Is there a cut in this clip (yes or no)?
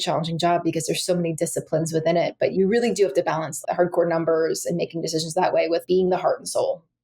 yes